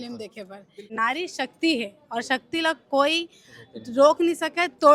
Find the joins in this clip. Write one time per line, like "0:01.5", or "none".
0:00.9